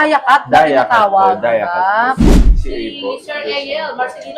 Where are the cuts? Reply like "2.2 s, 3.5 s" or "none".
2.3 s